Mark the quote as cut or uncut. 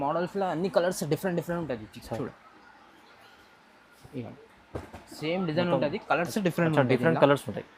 uncut